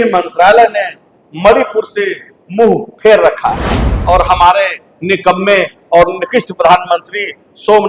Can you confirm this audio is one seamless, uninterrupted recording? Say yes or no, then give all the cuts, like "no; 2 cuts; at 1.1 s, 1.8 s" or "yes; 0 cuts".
no; 1 cut; at 3.9 s